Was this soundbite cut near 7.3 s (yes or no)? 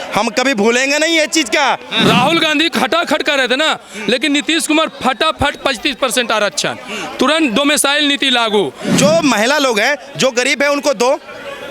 no